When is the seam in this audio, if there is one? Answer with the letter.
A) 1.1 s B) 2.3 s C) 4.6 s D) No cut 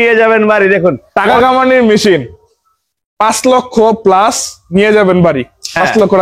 A